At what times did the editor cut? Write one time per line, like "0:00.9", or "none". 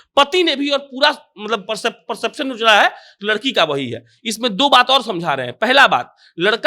none